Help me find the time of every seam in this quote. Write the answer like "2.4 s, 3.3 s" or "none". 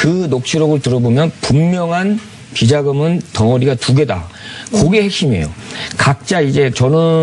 none